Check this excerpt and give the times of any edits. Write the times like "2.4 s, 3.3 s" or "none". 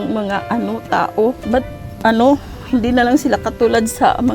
1.4 s